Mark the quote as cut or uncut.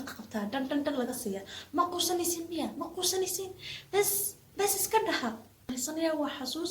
cut